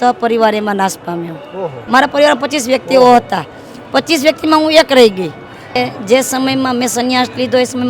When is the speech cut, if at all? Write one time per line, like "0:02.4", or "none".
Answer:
0:01.8
0:05.8